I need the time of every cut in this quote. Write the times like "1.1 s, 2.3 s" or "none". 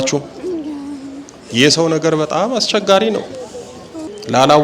none

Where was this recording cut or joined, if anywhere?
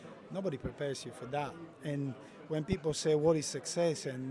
none

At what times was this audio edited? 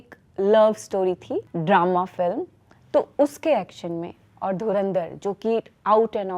1.5 s

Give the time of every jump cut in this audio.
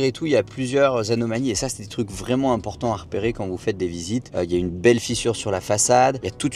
none

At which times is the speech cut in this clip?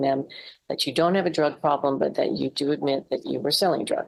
none

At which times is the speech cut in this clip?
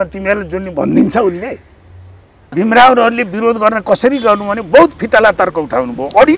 2.5 s

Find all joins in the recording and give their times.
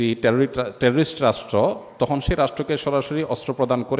none

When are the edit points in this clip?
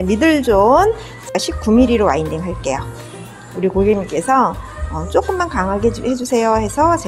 1.3 s

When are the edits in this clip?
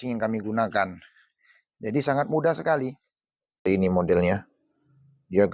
3.6 s

